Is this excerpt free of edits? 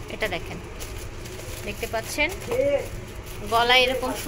yes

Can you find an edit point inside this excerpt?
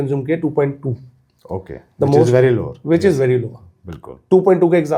no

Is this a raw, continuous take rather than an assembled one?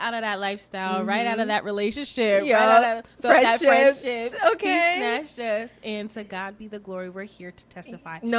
yes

